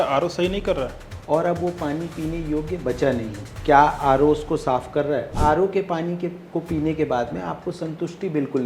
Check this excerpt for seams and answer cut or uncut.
cut